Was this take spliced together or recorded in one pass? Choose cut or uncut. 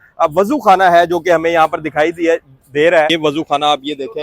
cut